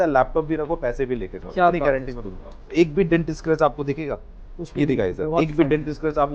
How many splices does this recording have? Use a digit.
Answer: 1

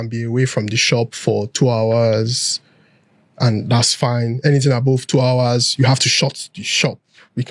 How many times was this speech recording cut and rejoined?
0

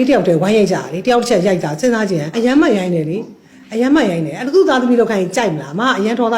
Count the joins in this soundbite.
1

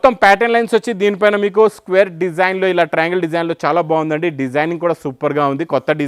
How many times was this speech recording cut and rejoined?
0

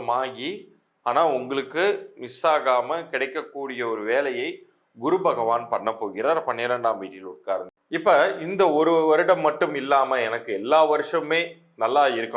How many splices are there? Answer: 1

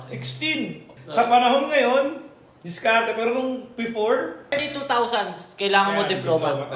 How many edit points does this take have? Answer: 2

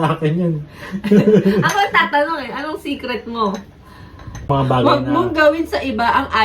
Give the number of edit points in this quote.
1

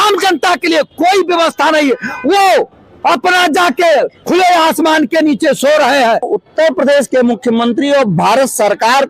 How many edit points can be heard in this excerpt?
1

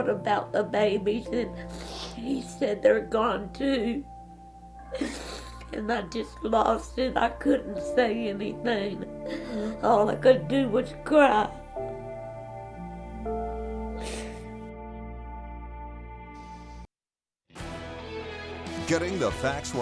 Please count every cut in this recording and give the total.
1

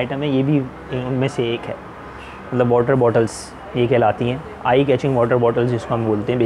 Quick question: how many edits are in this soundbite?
0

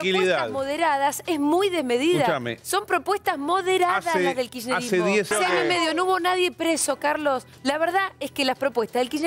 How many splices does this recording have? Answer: 2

